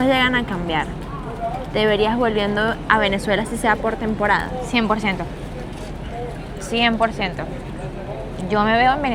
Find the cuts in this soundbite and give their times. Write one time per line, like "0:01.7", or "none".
none